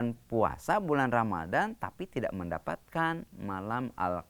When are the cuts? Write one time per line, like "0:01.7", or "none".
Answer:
none

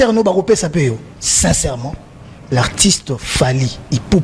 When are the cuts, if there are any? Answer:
0:01.2

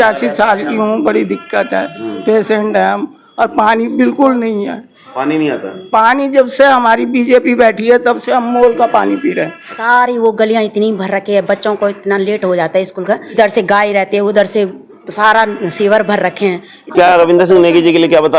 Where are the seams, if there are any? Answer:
0:09.8
0:13.3
0:16.9

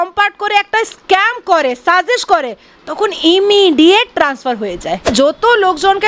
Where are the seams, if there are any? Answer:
0:05.1

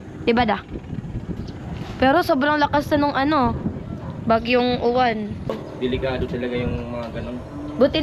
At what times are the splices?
0:05.5

